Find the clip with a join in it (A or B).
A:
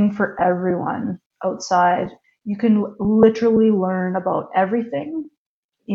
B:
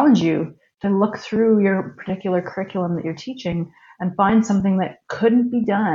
A